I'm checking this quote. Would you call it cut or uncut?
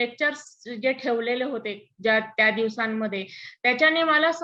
uncut